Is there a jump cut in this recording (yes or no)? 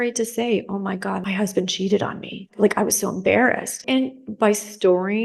yes